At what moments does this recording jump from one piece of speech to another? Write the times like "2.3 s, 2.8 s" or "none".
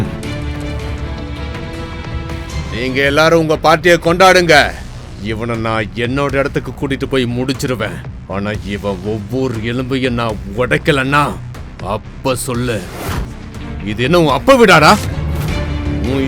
2.6 s, 13.2 s